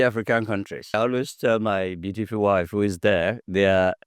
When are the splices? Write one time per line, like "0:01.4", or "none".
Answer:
0:00.9